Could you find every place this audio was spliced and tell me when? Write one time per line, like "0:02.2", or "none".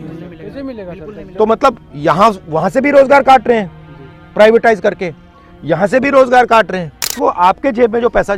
0:07.1